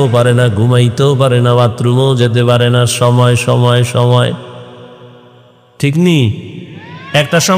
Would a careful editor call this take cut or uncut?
uncut